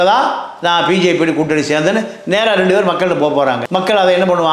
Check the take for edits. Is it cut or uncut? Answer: cut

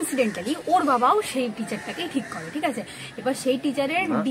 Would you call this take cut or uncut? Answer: uncut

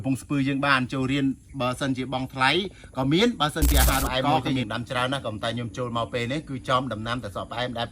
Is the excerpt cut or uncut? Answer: cut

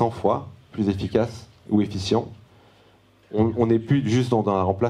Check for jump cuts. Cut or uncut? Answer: uncut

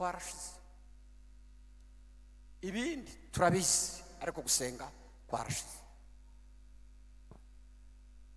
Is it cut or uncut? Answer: uncut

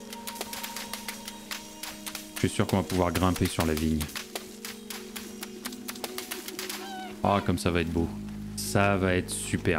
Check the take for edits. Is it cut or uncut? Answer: cut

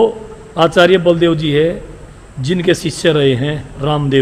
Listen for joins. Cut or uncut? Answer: uncut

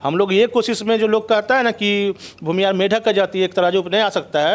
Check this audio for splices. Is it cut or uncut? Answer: uncut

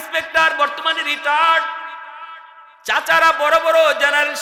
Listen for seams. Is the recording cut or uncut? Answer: uncut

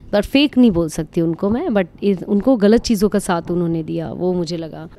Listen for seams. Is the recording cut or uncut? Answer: uncut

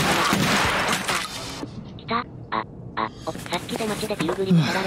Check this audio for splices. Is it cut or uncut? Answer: cut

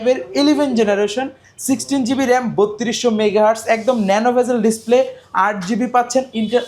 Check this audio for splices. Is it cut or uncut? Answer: uncut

